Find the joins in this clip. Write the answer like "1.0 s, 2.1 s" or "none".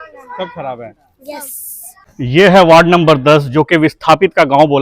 2.0 s